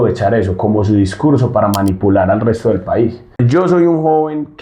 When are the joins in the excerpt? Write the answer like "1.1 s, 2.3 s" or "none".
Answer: 3.4 s